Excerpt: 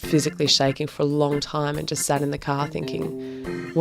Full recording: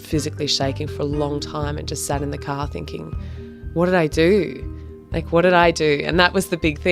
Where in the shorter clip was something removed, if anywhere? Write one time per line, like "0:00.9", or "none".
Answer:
none